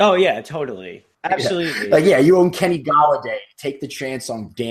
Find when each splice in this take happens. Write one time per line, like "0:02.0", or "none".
0:01.1